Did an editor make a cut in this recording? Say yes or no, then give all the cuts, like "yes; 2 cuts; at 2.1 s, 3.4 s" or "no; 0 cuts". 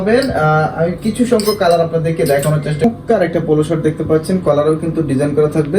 yes; 1 cut; at 2.8 s